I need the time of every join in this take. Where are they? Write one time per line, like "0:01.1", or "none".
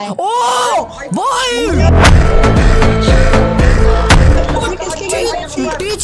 none